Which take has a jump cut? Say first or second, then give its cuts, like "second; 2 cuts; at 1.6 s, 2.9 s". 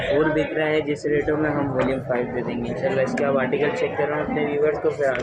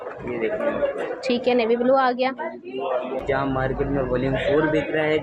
second; 1 cut; at 3.2 s